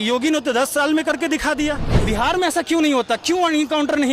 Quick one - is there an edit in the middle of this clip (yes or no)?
yes